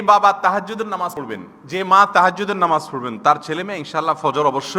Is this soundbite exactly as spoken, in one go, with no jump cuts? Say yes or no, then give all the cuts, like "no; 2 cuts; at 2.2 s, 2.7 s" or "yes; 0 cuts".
no; 1 cut; at 1.2 s